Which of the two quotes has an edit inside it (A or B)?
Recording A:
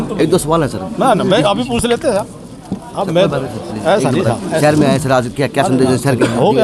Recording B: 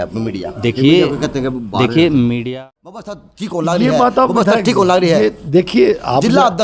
B